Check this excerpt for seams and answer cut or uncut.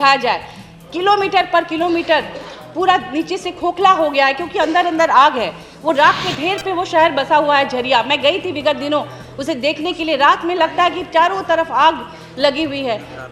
uncut